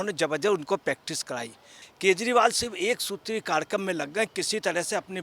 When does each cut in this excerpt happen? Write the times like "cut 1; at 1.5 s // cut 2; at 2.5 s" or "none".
cut 1; at 1.8 s